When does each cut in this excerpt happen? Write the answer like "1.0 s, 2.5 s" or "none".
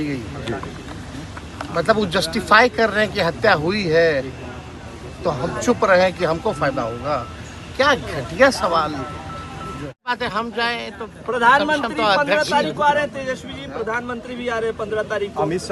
10.1 s